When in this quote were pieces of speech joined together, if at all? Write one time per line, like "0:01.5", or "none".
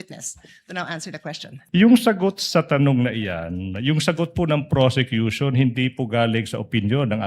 0:01.5